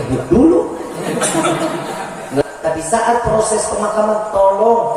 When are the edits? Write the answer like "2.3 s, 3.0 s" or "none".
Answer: 2.4 s